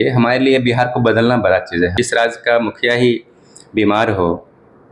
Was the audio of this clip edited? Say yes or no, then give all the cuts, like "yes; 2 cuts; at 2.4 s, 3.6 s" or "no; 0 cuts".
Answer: yes; 1 cut; at 1.9 s